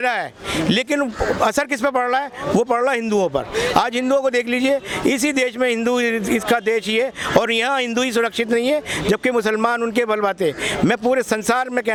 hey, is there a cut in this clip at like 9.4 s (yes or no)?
no